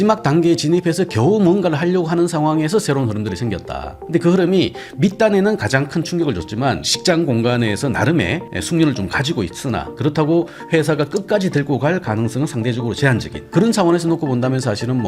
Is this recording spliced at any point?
yes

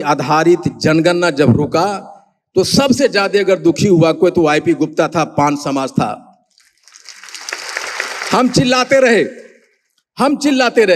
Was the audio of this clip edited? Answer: no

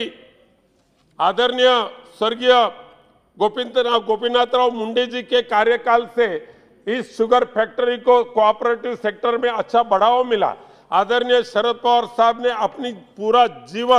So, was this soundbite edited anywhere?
no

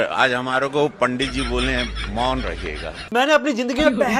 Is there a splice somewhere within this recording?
yes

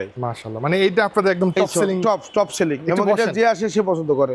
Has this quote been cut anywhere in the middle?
no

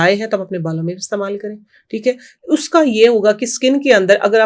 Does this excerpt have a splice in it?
no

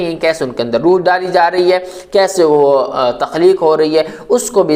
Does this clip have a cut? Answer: no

